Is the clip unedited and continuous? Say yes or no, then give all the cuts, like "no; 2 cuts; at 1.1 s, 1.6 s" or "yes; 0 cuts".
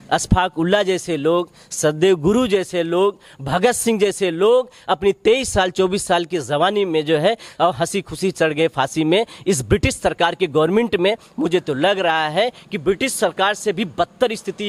yes; 0 cuts